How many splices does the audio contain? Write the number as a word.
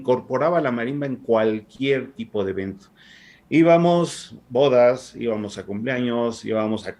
zero